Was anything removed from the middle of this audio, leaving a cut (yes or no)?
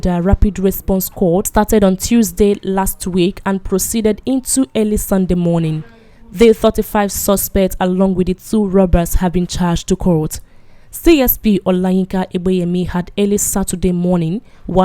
yes